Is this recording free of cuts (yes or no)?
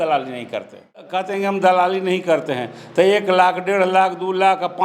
no